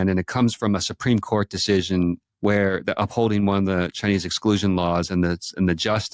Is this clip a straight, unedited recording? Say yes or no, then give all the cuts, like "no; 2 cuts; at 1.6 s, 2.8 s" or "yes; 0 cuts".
no; 1 cut; at 2.3 s